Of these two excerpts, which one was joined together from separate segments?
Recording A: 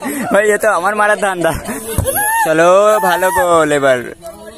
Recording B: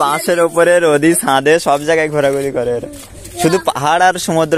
A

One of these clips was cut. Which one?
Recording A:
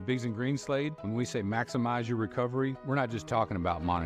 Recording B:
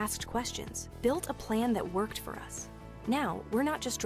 B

